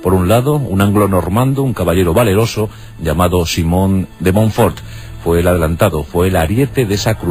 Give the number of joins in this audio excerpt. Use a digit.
1